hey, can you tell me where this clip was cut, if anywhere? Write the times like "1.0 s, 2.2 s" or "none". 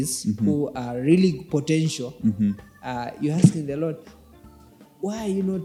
none